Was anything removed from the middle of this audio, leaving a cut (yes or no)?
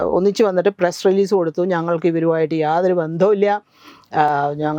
no